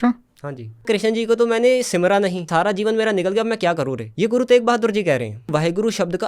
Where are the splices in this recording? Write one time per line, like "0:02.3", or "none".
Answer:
0:00.8
0:02.5
0:04.0
0:05.5